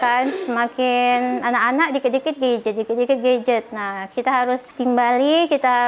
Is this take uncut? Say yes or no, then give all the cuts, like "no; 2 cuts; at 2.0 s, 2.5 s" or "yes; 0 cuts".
no; 1 cut; at 4.7 s